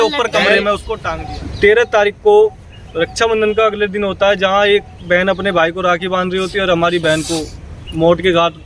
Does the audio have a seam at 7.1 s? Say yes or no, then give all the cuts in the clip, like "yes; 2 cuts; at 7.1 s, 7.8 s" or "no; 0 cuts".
no; 1 cut; at 1.1 s